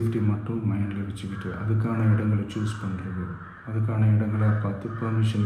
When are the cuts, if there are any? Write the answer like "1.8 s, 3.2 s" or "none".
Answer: none